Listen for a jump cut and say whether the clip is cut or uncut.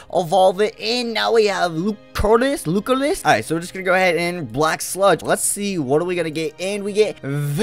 cut